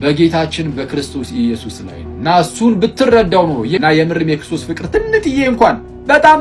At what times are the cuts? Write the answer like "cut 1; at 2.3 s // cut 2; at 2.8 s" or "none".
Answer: none